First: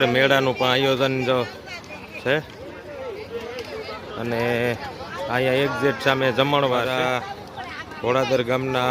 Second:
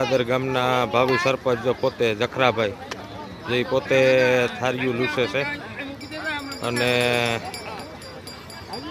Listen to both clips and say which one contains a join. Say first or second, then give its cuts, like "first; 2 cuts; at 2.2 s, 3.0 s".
first; 1 cut; at 6.9 s